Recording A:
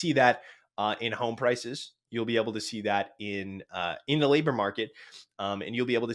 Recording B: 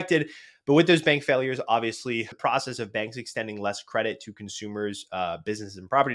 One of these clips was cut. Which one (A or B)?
B